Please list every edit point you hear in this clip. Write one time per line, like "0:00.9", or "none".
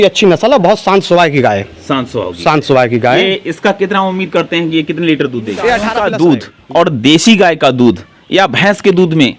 0:05.9